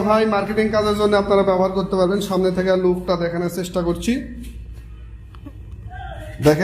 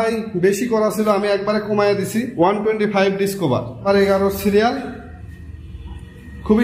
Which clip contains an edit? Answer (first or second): second